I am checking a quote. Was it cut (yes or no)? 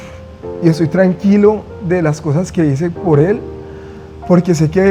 no